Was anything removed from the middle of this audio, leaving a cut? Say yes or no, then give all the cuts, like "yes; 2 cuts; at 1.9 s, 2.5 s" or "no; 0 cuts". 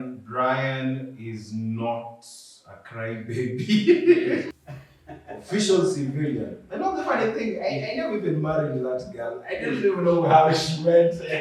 yes; 1 cut; at 4.5 s